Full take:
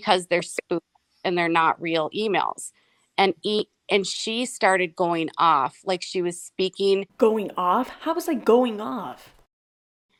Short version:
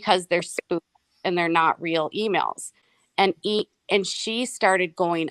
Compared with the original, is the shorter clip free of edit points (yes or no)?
yes